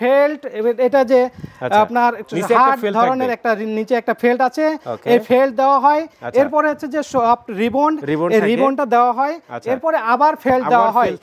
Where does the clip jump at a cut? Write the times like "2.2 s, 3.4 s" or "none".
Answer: none